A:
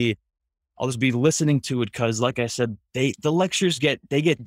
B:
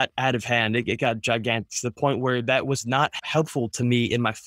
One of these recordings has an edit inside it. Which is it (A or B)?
B